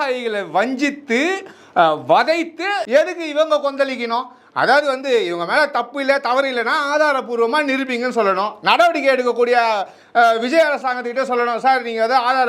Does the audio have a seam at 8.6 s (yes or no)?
no